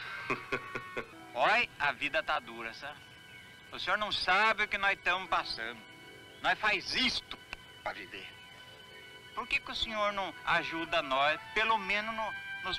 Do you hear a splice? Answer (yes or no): yes